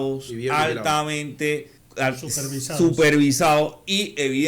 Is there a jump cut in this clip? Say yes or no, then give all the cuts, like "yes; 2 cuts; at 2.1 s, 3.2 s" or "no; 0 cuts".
yes; 1 cut; at 1.8 s